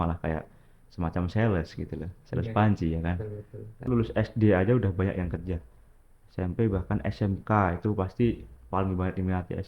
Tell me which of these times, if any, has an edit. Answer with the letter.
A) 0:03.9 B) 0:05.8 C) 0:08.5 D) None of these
A